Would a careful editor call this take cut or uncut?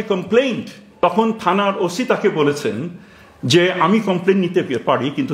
cut